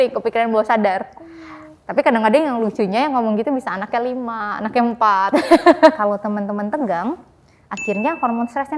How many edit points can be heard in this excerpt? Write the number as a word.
one